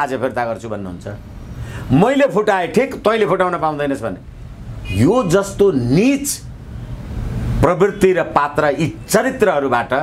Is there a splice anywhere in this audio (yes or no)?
no